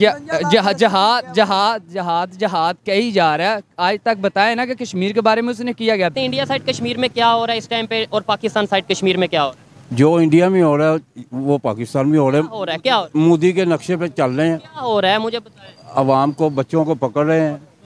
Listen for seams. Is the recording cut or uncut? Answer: cut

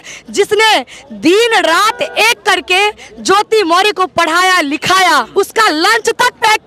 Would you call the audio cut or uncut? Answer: cut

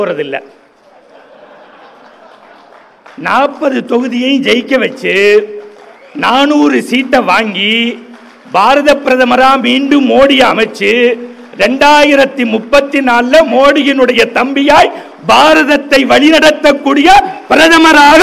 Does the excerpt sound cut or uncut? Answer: uncut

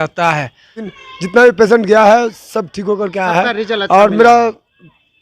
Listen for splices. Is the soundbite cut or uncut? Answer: cut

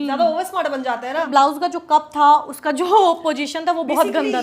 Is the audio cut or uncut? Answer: cut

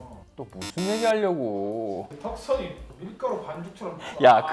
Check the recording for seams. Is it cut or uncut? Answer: uncut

